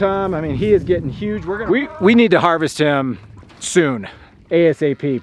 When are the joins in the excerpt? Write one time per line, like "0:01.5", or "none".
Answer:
0:01.3